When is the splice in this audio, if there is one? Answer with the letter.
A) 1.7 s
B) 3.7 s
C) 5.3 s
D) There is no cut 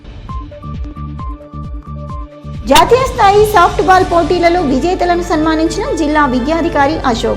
D